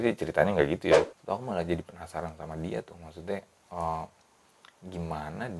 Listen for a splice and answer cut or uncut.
cut